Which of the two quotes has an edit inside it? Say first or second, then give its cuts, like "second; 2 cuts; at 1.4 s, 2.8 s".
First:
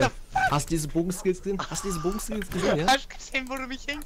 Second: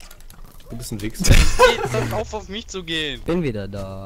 second; 1 cut; at 2.0 s